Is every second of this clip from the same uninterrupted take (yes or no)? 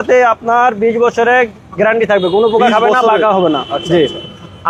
yes